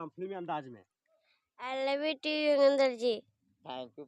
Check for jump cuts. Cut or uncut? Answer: uncut